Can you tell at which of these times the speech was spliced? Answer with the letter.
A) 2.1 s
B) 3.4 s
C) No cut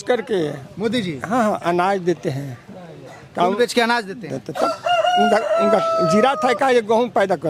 C